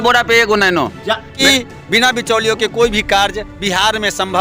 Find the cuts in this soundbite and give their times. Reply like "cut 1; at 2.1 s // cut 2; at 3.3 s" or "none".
cut 1; at 1.4 s